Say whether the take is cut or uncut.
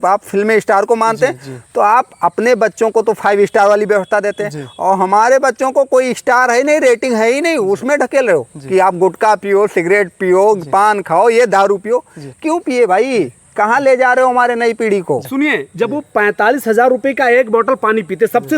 cut